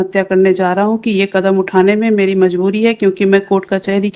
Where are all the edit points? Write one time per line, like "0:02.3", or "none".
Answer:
none